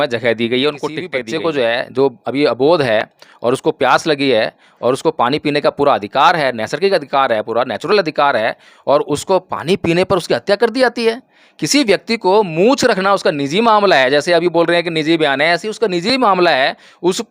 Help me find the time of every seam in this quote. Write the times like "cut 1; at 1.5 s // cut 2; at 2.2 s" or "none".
cut 1; at 1.1 s